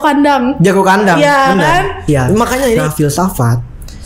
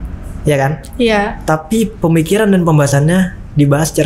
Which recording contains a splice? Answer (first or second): first